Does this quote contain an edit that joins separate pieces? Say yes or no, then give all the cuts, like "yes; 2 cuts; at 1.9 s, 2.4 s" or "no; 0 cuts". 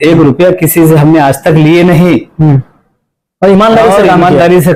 no; 0 cuts